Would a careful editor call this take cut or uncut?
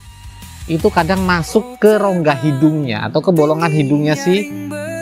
uncut